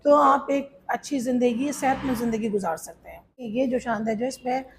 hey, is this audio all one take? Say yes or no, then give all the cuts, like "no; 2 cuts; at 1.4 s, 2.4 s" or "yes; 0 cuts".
no; 1 cut; at 3.4 s